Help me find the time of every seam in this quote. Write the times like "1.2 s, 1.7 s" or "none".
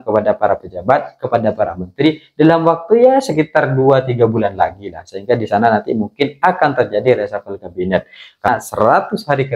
8.5 s